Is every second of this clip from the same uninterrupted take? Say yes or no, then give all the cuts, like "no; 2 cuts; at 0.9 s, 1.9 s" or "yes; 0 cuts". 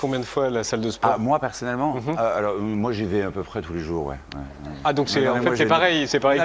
yes; 0 cuts